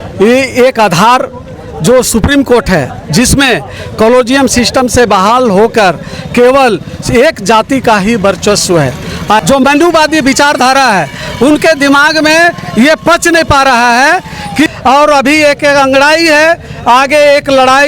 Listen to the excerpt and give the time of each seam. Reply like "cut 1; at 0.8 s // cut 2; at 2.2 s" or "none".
cut 1; at 9.4 s // cut 2; at 14.7 s